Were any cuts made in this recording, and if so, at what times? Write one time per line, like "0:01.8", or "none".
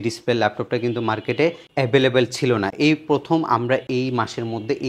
none